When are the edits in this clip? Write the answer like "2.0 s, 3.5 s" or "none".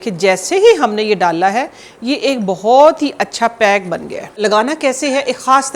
4.4 s

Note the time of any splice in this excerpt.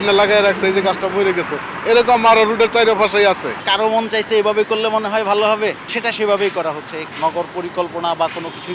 3.6 s, 5.9 s, 7.0 s

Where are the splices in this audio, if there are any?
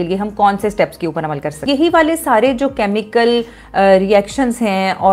1.7 s

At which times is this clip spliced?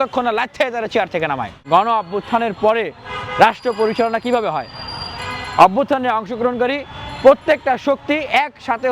1.5 s

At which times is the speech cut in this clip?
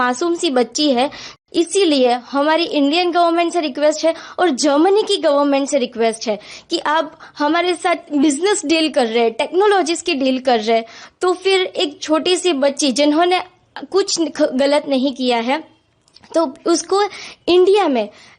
1.3 s

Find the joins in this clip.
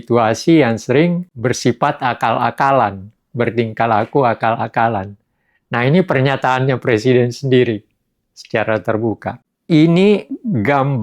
9.3 s

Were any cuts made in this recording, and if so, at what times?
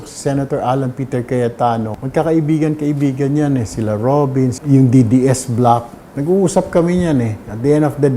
2.0 s, 4.6 s

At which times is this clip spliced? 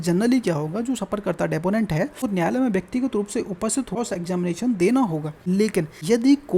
2.2 s, 4.0 s, 5.7 s

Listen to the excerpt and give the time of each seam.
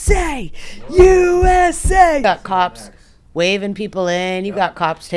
2.2 s

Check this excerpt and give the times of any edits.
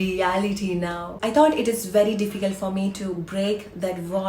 1.1 s

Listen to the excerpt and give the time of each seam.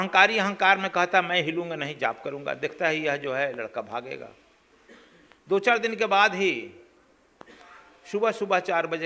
none

